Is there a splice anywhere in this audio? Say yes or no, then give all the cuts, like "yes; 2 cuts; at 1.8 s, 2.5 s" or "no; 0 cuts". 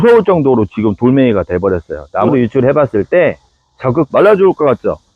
yes; 2 cuts; at 2.3 s, 4.1 s